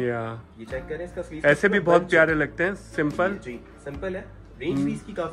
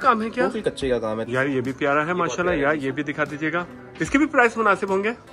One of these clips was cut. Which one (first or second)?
second